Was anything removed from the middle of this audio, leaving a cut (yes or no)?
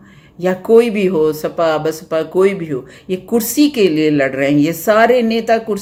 no